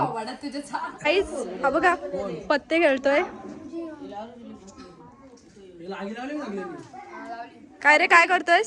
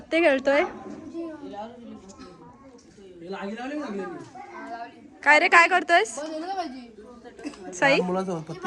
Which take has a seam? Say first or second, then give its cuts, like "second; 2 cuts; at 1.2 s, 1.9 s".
first; 1 cut; at 0.9 s